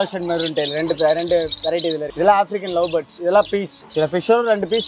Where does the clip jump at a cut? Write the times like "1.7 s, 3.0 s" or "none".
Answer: 1.9 s, 3.8 s